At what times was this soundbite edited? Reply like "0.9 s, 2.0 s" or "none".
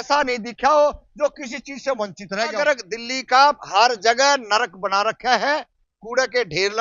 2.6 s